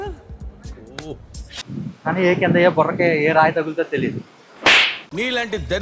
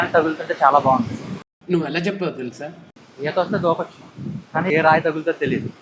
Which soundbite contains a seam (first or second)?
second